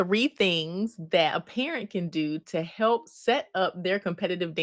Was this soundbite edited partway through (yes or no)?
no